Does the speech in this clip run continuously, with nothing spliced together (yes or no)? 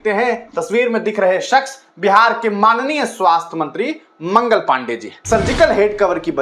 no